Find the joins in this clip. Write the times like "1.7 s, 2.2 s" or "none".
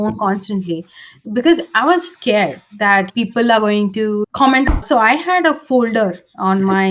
4.7 s